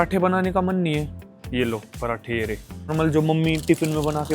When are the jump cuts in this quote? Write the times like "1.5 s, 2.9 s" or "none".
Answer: 2.9 s